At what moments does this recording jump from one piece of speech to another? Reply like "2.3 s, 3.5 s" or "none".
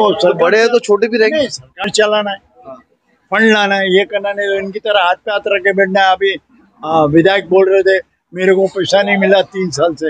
none